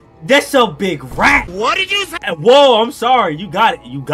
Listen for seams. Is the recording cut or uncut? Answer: uncut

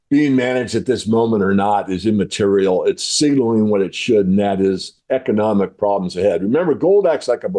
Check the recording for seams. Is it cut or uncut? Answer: uncut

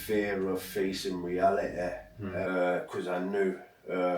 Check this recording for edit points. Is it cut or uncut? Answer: cut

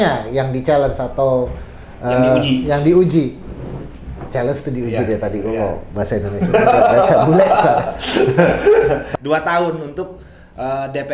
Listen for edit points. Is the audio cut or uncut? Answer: cut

